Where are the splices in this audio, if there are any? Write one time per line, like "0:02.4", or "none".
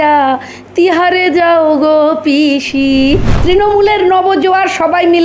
0:03.3